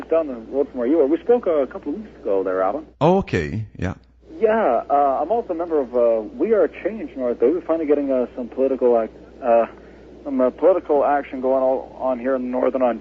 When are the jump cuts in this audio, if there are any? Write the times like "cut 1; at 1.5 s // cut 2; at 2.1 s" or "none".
cut 1; at 8.0 s